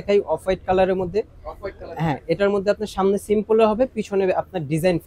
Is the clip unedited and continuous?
yes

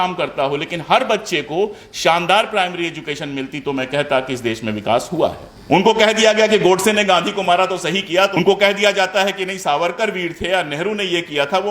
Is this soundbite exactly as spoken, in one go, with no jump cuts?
no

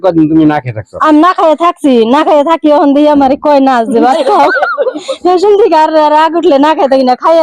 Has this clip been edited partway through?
yes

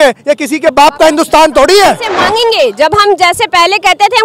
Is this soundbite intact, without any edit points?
no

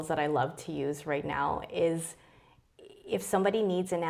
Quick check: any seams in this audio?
no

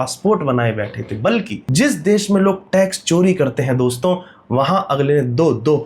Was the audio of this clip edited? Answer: yes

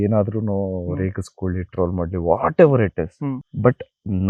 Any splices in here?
no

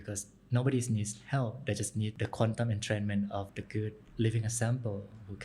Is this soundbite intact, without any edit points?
no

